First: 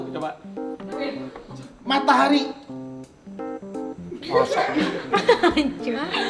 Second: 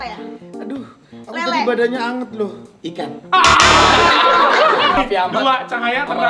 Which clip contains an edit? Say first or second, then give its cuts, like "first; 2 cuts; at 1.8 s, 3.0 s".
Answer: second; 1 cut; at 5.0 s